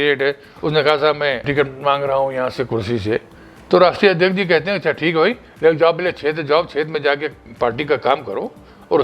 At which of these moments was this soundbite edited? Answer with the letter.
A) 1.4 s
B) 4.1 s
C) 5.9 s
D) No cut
A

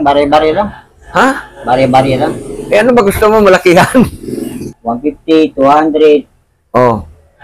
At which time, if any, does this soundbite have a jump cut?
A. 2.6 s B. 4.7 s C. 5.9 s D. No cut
B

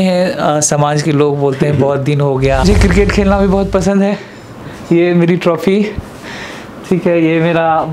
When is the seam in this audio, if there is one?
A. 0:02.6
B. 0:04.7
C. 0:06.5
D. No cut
A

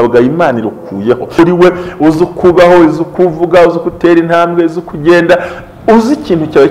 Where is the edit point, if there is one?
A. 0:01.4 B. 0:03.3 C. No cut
A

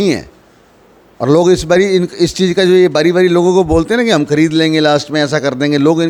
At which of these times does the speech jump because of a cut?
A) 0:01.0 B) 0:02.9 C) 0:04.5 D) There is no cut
D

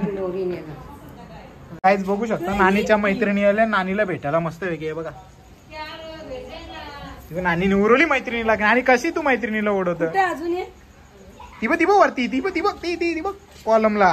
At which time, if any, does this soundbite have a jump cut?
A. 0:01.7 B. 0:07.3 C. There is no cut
A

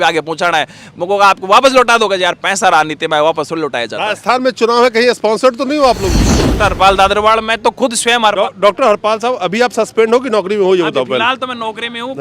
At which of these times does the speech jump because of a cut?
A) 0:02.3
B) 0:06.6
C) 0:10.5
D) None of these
B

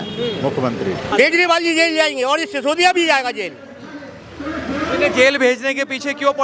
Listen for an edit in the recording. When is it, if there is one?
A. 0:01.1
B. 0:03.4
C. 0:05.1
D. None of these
A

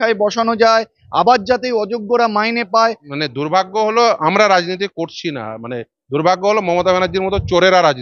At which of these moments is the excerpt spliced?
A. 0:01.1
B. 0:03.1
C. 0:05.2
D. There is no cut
B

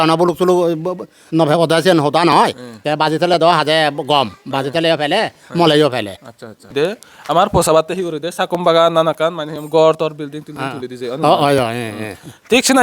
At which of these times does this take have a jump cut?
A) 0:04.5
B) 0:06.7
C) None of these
B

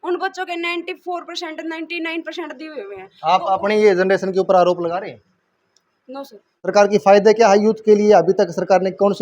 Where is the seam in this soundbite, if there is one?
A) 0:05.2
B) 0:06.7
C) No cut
B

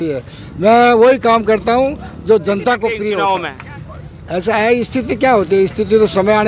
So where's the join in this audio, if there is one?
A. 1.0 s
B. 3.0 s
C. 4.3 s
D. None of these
B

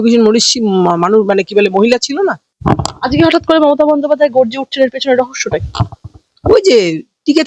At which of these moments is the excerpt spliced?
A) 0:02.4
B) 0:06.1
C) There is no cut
C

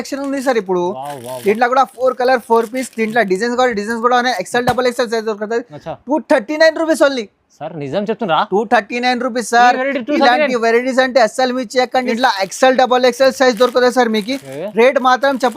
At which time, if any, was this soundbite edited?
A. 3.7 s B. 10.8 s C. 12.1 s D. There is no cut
C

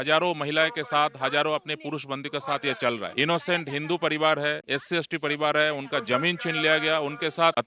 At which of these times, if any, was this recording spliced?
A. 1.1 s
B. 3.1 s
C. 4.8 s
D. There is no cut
B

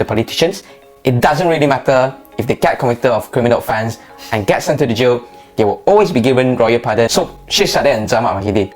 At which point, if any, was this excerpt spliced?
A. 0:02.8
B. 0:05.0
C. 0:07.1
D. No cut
C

